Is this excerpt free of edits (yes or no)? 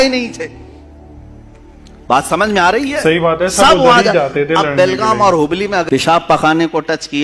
no